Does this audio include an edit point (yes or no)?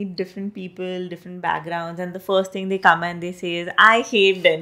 no